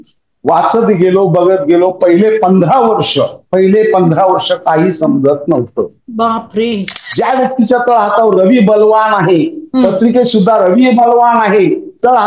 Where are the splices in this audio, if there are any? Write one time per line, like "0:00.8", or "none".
0:07.0